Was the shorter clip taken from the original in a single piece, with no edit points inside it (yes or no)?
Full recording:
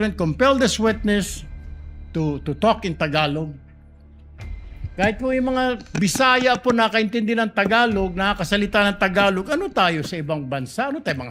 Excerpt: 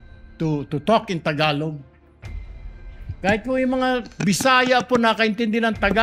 yes